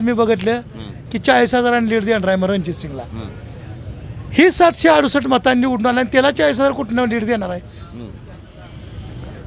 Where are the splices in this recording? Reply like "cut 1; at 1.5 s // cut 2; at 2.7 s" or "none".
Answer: none

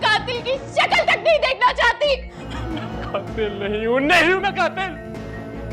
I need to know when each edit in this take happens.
cut 1; at 2.4 s

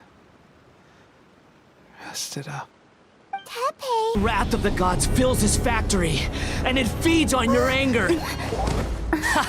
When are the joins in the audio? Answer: cut 1; at 4.2 s

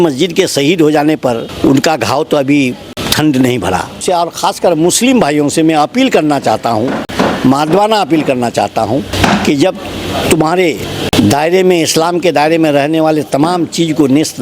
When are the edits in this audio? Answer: cut 1; at 1.5 s // cut 2; at 2.9 s // cut 3; at 4.0 s // cut 4; at 7.0 s // cut 5; at 9.1 s // cut 6; at 11.1 s

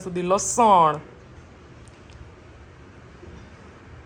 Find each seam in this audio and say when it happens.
none

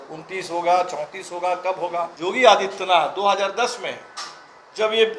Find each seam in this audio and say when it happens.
cut 1; at 2.1 s

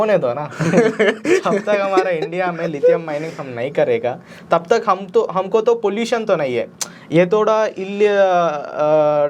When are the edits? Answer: none

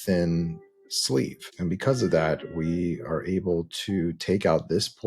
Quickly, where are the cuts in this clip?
cut 1; at 1.4 s

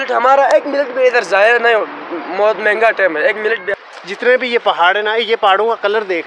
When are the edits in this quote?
cut 1; at 3.7 s

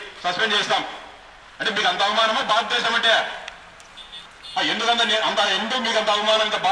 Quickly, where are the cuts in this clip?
none

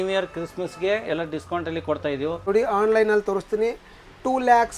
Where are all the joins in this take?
cut 1; at 2.4 s

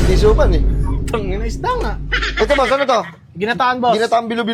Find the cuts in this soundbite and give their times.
none

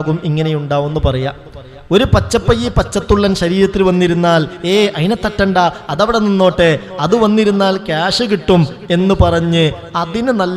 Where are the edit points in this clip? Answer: none

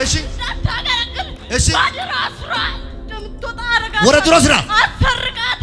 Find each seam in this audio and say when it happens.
none

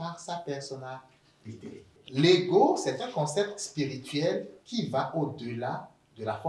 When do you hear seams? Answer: cut 1; at 2.0 s

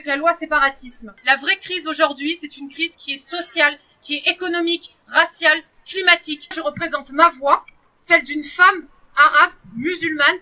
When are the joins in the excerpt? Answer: cut 1; at 1.1 s // cut 2; at 6.5 s

